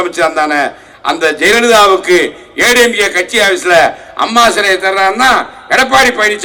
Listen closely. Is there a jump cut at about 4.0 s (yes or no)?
no